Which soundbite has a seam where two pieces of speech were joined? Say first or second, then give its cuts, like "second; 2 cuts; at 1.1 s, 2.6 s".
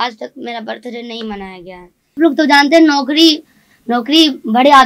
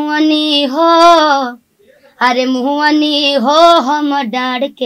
first; 1 cut; at 2.2 s